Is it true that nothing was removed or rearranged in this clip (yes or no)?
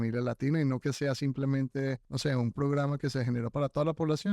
no